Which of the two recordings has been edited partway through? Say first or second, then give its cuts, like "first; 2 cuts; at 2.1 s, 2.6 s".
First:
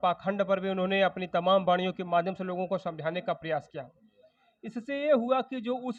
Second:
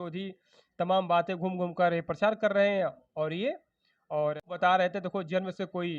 second; 1 cut; at 4.5 s